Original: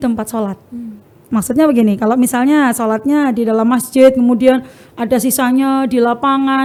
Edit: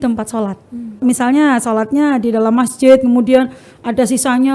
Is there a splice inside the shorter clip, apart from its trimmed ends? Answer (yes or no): yes